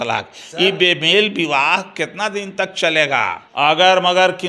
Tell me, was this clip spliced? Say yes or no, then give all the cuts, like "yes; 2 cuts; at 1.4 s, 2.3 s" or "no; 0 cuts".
yes; 1 cut; at 3.4 s